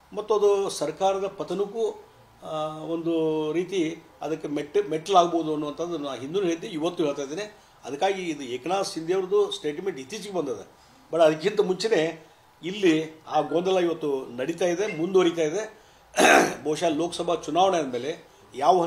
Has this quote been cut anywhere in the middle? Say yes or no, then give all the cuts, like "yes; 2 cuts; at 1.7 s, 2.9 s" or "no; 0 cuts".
yes; 1 cut; at 7.4 s